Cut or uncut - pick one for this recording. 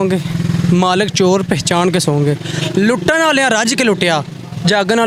uncut